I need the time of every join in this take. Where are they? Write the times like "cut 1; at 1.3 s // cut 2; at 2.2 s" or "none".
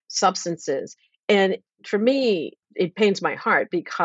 cut 1; at 1.6 s // cut 2; at 2.6 s